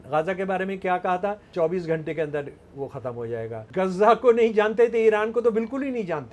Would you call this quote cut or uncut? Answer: cut